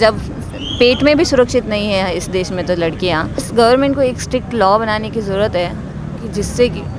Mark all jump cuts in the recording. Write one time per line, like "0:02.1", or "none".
0:03.5